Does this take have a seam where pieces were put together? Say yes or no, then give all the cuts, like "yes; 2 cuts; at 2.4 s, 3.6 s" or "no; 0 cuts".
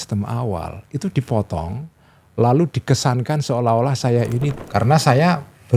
yes; 1 cut; at 4.6 s